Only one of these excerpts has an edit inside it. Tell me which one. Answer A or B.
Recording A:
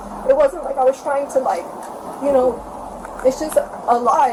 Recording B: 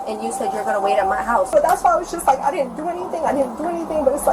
B